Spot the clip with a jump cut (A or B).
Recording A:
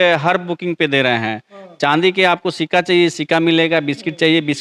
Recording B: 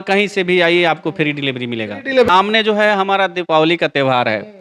B